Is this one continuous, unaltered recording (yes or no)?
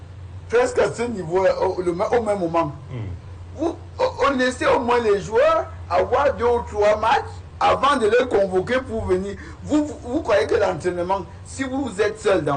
yes